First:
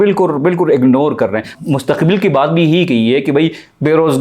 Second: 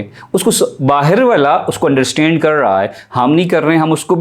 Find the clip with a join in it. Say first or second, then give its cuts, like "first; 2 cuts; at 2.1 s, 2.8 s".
first; 1 cut; at 1.5 s